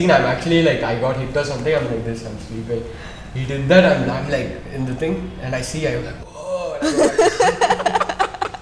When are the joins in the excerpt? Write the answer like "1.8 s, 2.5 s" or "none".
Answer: none